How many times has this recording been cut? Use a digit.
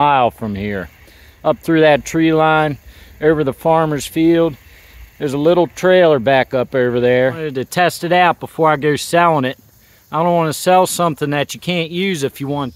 1